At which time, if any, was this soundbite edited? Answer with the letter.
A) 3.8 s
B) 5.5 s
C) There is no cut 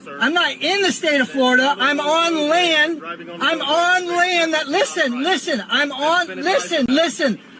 C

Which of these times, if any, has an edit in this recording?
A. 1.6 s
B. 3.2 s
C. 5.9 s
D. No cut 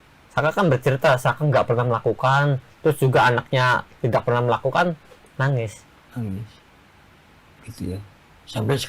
D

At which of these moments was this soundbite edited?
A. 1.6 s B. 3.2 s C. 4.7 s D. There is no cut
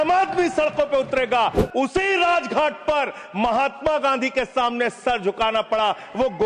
A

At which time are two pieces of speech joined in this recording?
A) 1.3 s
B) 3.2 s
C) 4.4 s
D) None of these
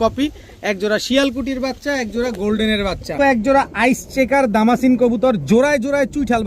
B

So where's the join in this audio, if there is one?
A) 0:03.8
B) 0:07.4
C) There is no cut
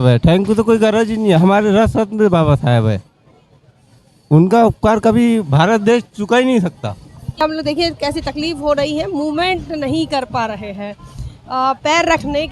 B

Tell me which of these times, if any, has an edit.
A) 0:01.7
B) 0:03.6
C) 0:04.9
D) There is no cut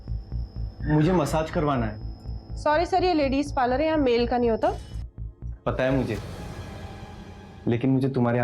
C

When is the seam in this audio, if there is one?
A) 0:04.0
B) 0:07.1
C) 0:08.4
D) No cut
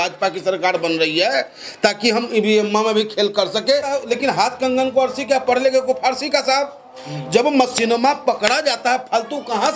A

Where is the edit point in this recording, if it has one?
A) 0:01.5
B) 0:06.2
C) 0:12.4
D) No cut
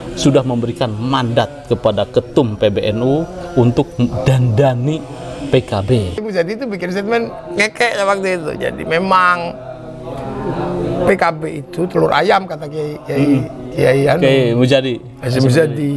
B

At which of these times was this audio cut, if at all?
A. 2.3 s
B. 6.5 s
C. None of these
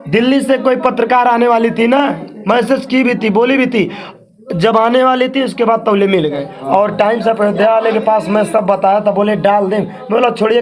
B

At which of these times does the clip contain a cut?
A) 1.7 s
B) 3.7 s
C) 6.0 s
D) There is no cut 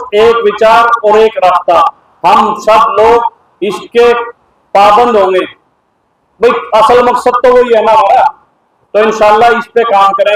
D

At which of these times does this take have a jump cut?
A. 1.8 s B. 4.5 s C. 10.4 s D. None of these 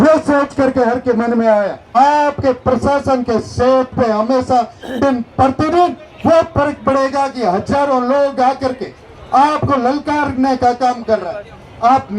A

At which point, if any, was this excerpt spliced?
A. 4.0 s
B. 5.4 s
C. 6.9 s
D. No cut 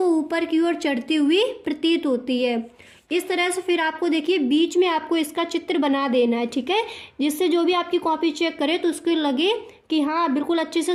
D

